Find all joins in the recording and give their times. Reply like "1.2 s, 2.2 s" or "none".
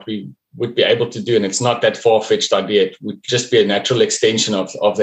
none